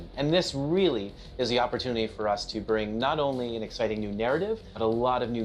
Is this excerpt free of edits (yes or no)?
yes